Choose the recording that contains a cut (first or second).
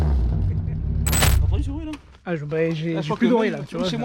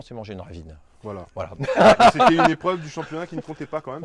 first